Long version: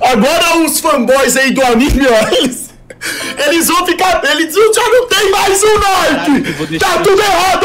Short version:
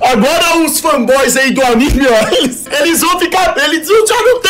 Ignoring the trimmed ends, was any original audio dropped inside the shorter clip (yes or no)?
yes